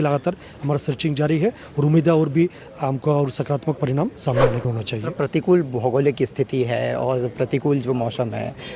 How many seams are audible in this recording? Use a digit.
1